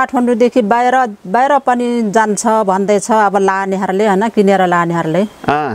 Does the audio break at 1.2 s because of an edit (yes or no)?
no